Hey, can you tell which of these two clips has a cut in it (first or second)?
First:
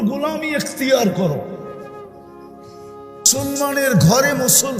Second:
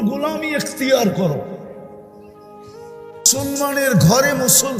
first